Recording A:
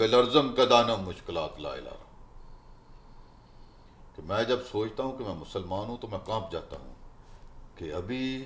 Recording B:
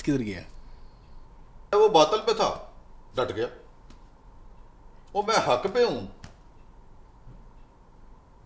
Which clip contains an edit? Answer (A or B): B